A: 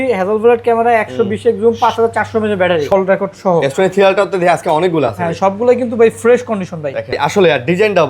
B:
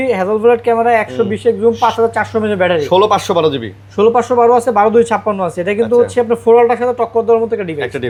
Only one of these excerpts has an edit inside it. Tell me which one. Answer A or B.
A